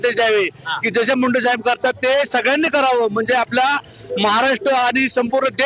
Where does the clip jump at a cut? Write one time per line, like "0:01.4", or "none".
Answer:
none